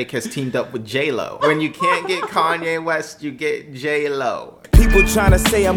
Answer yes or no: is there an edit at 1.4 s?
yes